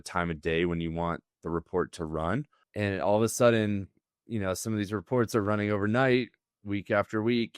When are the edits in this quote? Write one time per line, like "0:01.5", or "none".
0:02.6

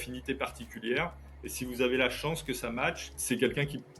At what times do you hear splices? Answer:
0:03.1

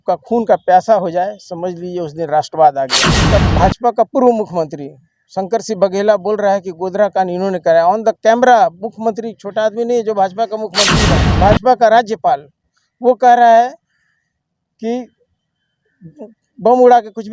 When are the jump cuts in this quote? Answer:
0:03.2
0:11.0

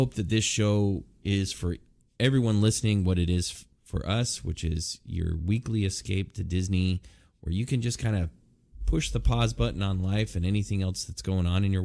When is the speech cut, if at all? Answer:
none

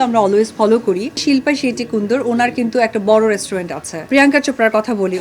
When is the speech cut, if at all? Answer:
0:01.2
0:04.1

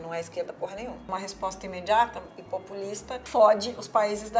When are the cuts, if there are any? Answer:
0:01.1
0:03.1

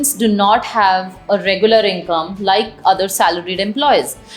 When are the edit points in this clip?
none

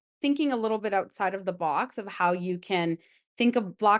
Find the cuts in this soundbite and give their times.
none

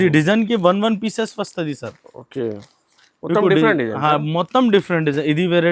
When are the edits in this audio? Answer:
none

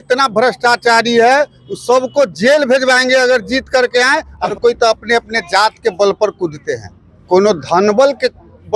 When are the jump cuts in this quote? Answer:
0:04.5

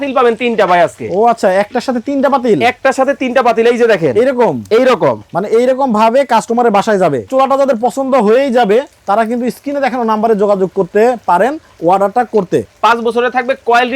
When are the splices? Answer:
0:07.3
0:12.7

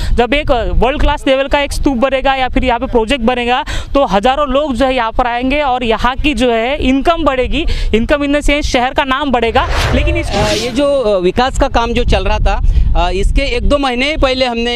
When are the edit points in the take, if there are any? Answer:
0:10.2

